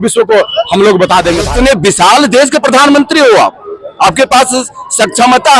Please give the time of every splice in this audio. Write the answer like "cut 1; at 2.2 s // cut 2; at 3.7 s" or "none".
cut 1; at 1.5 s